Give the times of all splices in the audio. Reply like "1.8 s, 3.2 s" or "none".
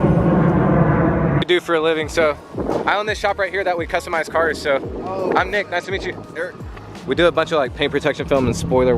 1.5 s, 7.0 s